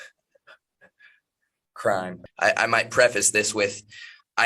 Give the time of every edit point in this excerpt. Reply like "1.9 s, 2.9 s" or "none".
2.2 s